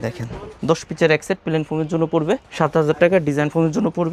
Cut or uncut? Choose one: uncut